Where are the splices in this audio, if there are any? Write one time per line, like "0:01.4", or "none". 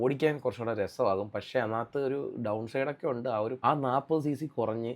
0:03.6